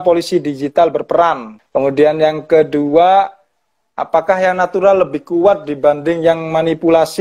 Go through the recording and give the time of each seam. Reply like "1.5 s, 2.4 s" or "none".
1.5 s